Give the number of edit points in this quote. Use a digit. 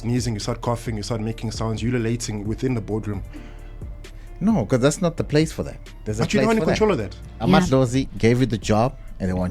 1